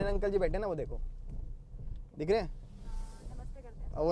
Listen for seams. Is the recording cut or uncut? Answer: uncut